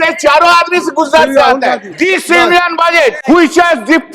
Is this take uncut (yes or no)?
no